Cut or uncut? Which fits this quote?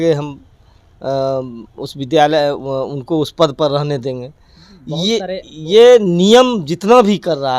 uncut